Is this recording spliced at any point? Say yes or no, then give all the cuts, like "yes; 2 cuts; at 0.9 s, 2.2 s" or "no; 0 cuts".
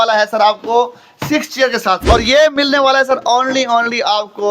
yes; 1 cut; at 2.0 s